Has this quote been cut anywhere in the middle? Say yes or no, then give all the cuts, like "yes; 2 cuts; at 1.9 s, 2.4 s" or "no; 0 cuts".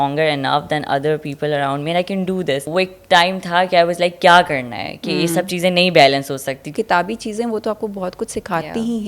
yes; 2 cuts; at 2.7 s, 6.7 s